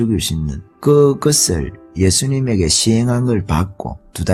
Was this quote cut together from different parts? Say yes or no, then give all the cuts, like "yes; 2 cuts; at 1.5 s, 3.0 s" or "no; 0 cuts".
no; 0 cuts